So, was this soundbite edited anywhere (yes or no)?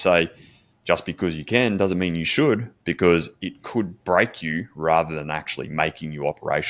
no